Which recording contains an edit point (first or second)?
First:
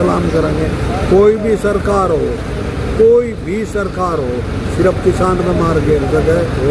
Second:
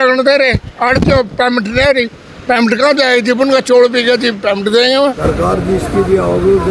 second